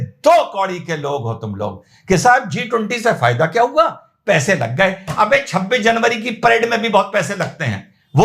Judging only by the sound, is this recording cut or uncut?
uncut